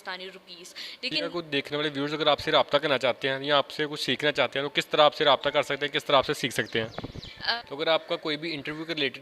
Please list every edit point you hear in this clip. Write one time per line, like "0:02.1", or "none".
0:01.3
0:07.5